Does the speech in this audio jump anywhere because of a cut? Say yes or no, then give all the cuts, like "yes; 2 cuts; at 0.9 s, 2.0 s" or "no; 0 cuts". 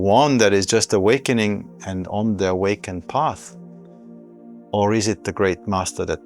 yes; 2 cuts; at 3.4 s, 4.7 s